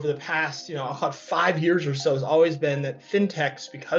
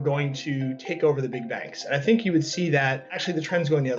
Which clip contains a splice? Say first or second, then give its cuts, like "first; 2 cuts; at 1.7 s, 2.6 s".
second; 1 cut; at 3.1 s